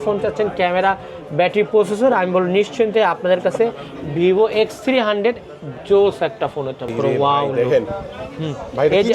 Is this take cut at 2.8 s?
no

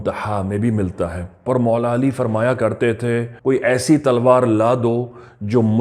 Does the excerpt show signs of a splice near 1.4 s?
yes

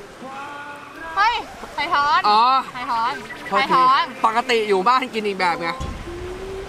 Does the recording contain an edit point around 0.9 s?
no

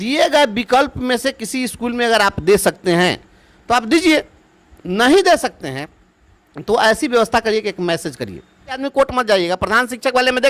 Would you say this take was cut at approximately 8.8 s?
yes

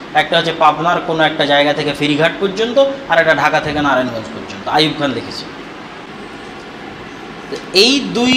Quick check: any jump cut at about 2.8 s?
no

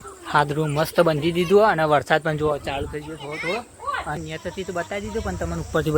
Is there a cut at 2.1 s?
no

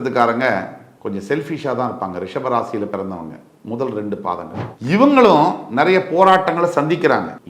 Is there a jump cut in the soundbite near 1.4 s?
no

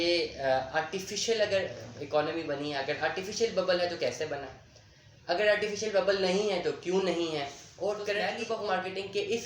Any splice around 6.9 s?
no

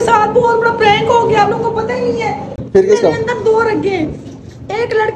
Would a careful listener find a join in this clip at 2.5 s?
yes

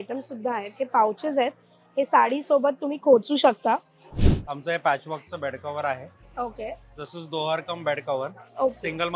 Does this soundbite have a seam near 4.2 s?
yes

